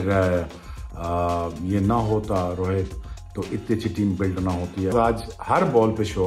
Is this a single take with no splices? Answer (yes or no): yes